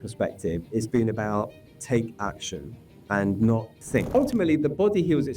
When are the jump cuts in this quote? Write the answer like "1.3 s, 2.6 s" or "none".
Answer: 4.1 s